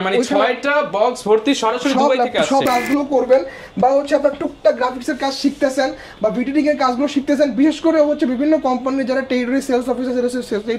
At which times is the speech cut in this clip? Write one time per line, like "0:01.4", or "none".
0:02.7